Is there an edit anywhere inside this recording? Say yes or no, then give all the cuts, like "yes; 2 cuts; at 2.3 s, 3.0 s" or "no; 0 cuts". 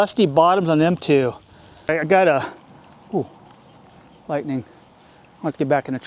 yes; 1 cut; at 1.9 s